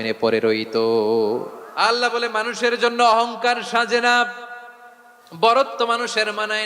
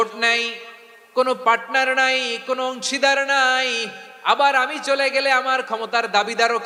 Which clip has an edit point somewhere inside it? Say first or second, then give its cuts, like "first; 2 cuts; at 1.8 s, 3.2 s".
first; 1 cut; at 1.6 s